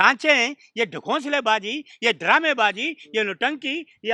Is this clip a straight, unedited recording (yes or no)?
yes